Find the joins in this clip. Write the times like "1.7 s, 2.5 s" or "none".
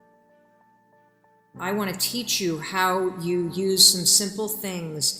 1.5 s